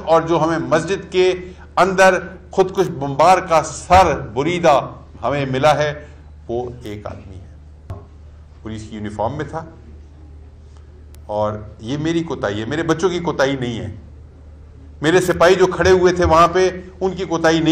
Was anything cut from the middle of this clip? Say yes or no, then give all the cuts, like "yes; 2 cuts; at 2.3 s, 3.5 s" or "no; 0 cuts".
yes; 1 cut; at 7.9 s